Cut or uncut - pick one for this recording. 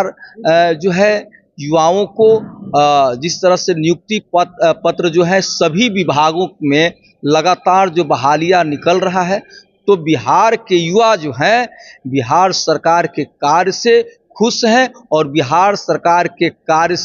uncut